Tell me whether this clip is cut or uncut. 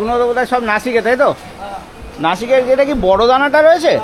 uncut